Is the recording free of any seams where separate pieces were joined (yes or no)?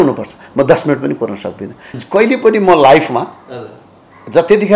no